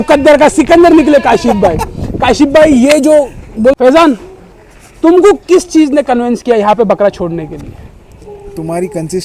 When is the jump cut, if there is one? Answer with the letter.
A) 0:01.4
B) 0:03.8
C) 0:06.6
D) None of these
B